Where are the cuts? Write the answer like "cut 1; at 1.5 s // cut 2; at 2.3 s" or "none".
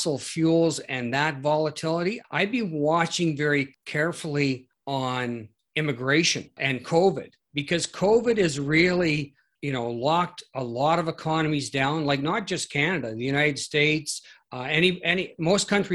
cut 1; at 2.2 s // cut 2; at 3.8 s // cut 3; at 4.7 s // cut 4; at 5.6 s // cut 5; at 6.6 s // cut 6; at 9.5 s